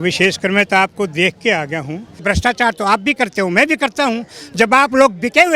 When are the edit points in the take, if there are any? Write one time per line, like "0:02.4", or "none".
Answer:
0:02.1